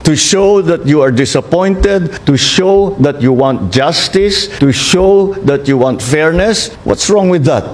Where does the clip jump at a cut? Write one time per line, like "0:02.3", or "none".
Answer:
none

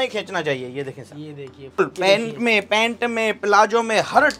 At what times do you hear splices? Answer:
0:01.8

